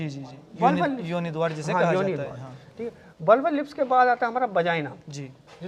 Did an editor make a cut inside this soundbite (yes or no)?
no